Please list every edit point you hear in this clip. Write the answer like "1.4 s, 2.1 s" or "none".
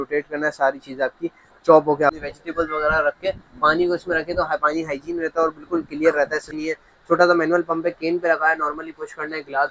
2.2 s, 6.5 s